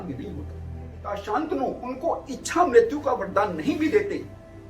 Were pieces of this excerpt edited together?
yes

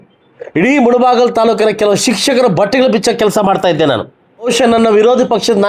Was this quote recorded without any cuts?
no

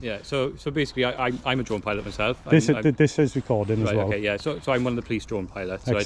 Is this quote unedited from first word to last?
yes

